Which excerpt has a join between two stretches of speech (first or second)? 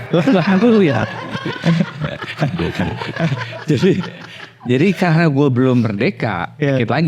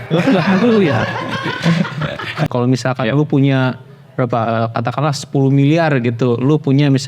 second